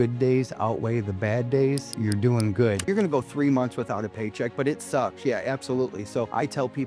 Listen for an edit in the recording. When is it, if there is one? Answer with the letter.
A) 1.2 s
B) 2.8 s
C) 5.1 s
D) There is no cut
B